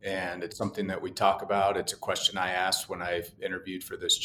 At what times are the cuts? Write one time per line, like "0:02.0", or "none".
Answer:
none